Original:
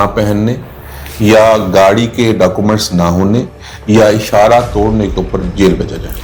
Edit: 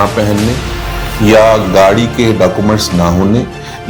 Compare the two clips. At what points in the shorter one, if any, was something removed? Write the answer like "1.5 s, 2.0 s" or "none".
none